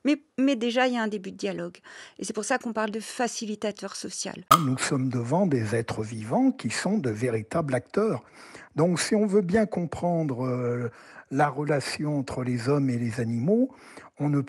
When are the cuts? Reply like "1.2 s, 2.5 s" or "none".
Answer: 4.4 s